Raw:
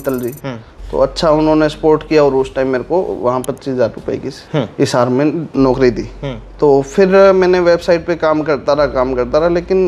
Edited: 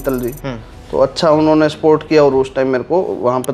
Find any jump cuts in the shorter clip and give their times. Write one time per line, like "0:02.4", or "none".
none